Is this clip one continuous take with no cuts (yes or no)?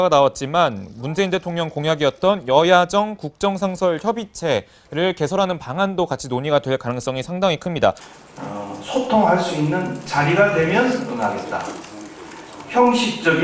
yes